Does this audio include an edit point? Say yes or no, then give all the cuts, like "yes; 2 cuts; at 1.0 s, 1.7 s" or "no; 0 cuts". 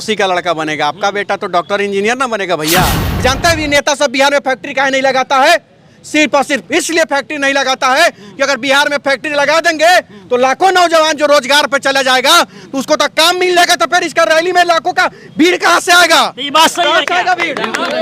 yes; 1 cut; at 3.0 s